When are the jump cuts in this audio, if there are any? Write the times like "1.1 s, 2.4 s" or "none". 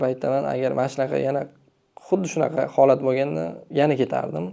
3.6 s